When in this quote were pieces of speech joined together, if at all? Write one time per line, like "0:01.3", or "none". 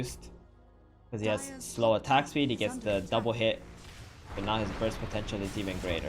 none